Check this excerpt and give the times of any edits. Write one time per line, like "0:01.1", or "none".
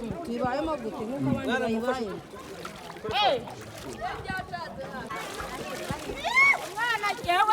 0:05.1